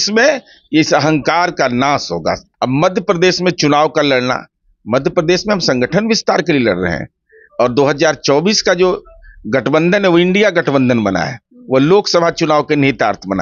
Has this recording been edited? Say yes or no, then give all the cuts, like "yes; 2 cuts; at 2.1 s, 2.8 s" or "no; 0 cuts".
yes; 1 cut; at 2.5 s